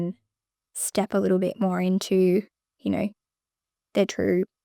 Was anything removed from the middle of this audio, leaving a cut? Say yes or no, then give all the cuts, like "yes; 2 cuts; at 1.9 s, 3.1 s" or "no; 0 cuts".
no; 0 cuts